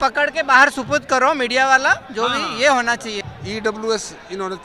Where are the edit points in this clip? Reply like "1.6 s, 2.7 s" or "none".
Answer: 3.2 s